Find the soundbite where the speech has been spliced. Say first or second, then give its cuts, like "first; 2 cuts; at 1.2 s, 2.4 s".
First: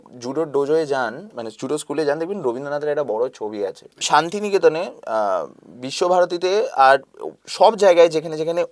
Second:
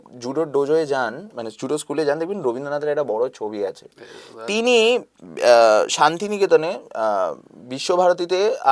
first; 1 cut; at 4.0 s